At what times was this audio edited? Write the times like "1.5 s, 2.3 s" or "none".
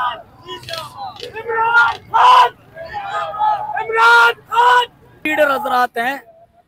5.5 s